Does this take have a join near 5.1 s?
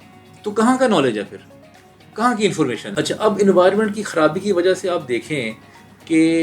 no; 1 cut; at 2.9 s

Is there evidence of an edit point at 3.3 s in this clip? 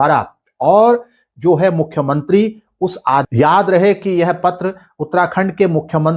yes; 1 cut; at 3.3 s

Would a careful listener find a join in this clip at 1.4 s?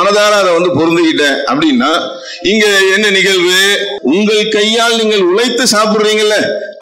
no; 1 cut; at 3.9 s

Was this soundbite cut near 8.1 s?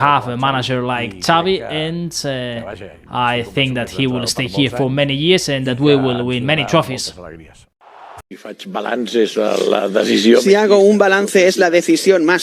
yes; 1 cut; at 8.1 s

